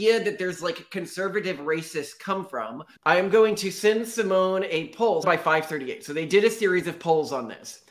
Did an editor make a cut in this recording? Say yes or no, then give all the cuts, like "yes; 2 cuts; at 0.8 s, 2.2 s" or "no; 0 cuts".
yes; 2 cuts; at 2.9 s, 5.2 s